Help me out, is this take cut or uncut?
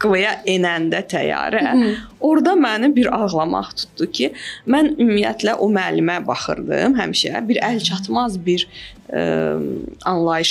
uncut